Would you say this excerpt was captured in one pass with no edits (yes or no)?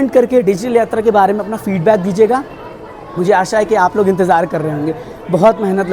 yes